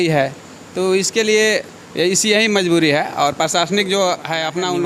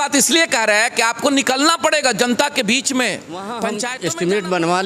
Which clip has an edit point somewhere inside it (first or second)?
second